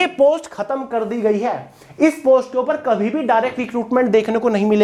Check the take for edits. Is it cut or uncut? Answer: uncut